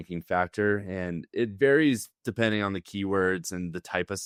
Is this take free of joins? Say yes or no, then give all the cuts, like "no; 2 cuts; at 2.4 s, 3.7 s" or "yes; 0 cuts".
yes; 0 cuts